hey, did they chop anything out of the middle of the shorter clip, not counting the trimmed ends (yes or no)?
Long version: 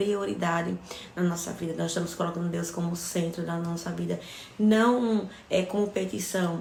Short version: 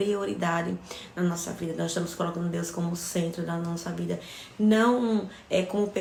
no